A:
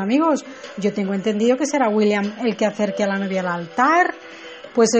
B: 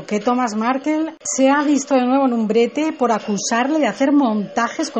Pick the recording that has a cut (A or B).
A